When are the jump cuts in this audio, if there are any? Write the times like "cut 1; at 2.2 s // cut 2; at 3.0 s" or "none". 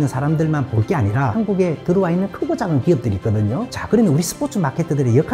cut 1; at 1.3 s // cut 2; at 3.7 s